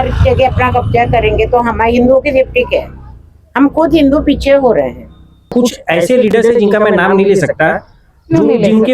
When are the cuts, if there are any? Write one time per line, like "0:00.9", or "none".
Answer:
0:05.5